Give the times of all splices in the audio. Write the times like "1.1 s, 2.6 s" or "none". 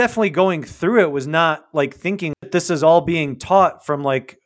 2.4 s